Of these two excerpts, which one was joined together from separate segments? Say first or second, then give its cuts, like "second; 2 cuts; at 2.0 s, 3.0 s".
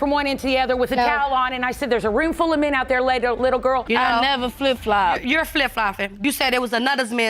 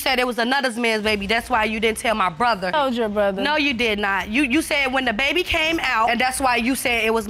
first; 1 cut; at 3.8 s